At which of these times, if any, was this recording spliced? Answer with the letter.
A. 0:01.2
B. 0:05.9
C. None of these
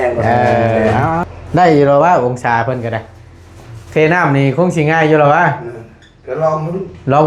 A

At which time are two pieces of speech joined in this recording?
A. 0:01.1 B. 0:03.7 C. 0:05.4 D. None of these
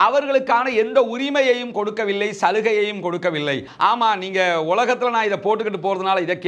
B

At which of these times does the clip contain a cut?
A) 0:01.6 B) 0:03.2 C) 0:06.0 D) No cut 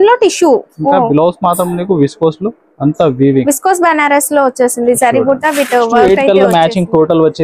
C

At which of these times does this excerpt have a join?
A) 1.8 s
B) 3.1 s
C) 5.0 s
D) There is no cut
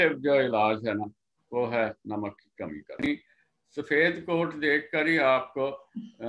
B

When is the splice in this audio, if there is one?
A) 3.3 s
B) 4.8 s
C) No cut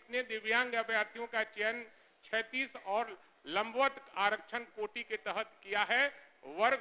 C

